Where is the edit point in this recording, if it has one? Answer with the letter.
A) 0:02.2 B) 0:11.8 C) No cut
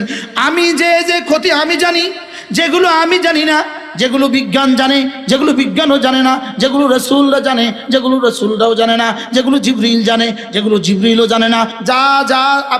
B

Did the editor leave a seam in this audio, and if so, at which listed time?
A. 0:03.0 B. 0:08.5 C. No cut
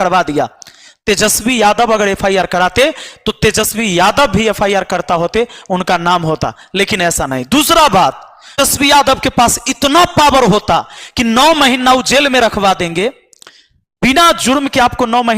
B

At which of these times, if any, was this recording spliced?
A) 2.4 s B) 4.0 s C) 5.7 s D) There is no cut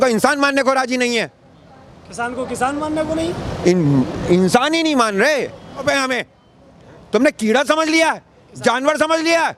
C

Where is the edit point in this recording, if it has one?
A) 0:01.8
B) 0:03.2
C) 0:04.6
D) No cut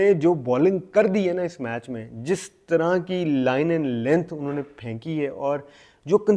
D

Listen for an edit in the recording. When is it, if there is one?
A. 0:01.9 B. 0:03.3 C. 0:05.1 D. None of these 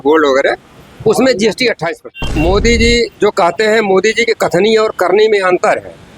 A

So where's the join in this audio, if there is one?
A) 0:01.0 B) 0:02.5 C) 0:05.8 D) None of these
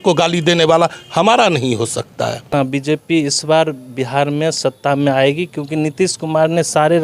B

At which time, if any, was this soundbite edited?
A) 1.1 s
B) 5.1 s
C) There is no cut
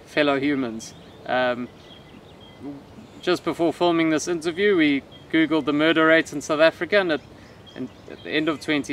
C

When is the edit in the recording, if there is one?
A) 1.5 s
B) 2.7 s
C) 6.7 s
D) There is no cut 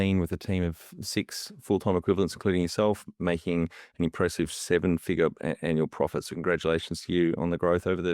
D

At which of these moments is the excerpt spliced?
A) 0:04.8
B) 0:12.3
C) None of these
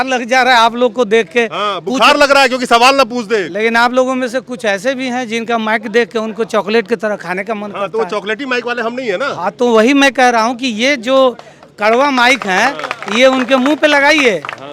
C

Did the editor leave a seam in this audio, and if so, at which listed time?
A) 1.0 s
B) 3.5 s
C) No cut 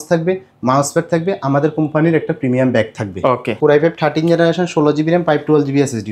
B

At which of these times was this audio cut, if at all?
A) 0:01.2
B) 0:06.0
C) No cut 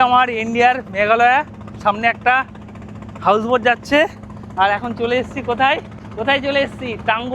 B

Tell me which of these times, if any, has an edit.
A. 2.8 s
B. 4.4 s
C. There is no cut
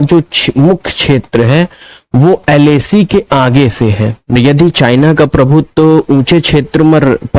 B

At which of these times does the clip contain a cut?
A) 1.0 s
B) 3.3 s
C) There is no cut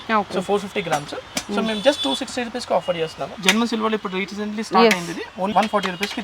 B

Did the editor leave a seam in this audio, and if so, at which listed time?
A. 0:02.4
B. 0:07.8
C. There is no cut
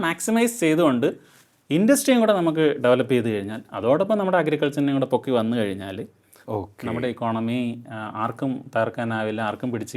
C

